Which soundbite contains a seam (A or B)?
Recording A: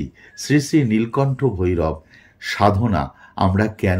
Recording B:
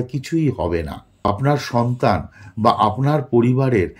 B